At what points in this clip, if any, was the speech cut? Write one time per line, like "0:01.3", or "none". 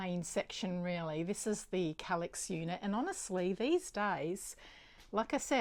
none